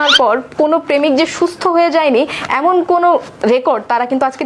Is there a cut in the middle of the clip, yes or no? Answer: no